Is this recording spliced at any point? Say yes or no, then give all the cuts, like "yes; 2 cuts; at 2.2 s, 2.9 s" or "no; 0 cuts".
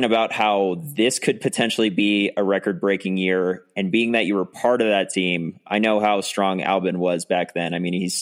no; 0 cuts